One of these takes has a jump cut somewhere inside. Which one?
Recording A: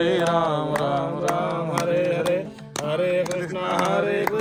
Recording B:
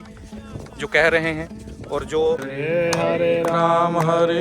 B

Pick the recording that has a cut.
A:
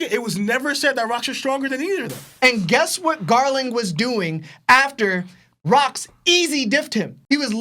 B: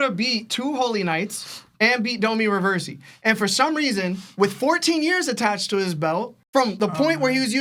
A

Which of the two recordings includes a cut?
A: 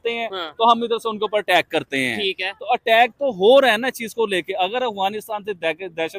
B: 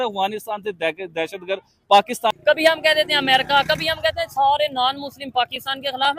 B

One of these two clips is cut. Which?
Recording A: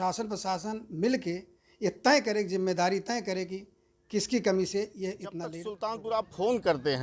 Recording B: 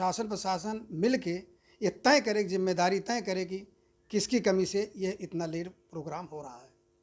A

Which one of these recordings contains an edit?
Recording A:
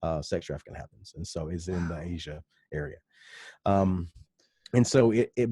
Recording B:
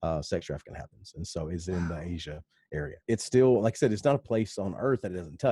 B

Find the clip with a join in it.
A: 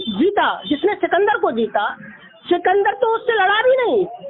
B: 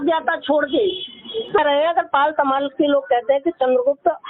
B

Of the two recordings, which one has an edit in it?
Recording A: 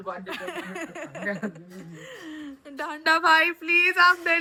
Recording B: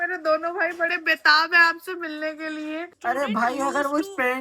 B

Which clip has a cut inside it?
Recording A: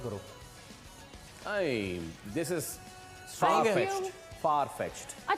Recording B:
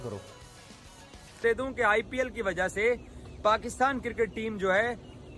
B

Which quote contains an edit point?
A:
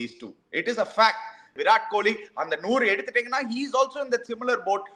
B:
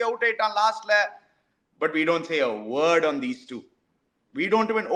A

